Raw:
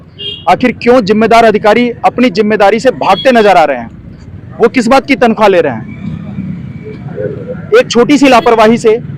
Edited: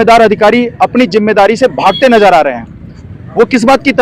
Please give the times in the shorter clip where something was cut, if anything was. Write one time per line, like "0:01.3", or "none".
none

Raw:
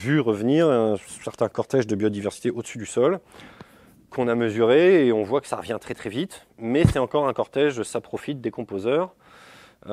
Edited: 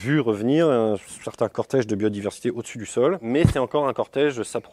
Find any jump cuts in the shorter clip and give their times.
0:03.2

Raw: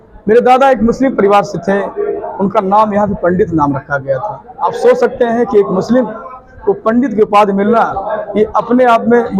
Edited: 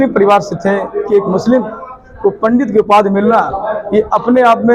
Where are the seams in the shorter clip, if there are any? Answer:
0:01.1

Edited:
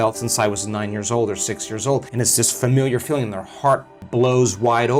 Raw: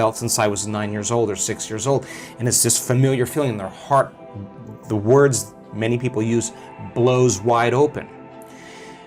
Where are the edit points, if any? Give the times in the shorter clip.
0:02.1
0:04.0

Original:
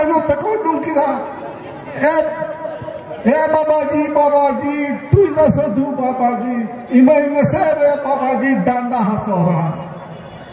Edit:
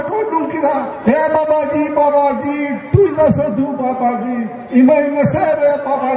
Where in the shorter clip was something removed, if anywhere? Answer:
0:00.9

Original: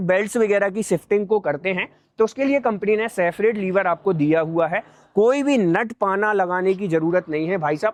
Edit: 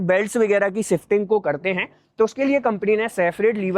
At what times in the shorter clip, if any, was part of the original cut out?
none

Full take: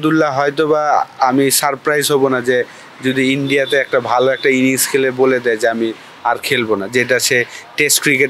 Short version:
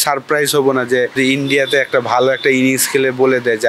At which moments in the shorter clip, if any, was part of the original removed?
0:01.2

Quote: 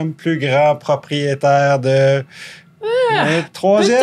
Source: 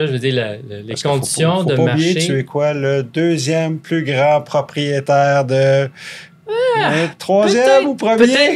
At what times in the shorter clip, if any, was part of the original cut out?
none

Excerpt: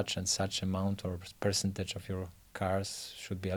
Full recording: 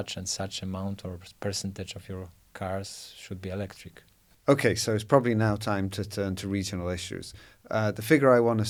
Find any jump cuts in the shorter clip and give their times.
none

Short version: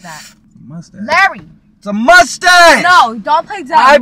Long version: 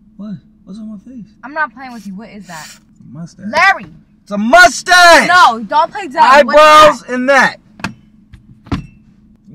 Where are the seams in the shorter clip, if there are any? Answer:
none

